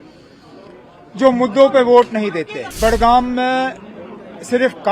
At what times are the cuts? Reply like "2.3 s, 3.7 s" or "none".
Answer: 2.6 s